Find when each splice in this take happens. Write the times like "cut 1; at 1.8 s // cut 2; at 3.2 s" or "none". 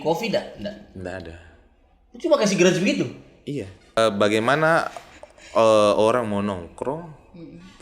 cut 1; at 4.0 s